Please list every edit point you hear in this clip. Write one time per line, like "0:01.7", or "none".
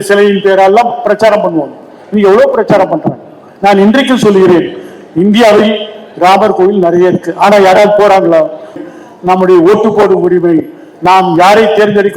0:08.8